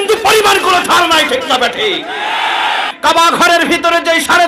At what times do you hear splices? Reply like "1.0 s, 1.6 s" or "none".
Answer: 2.9 s